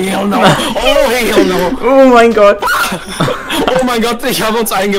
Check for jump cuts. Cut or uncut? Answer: uncut